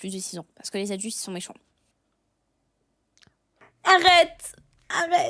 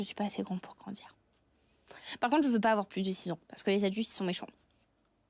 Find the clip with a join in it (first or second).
first